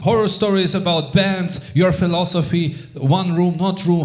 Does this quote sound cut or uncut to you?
uncut